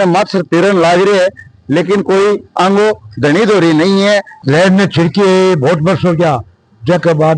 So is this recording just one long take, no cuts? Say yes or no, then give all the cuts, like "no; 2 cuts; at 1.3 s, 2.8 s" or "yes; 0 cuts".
no; 1 cut; at 4.3 s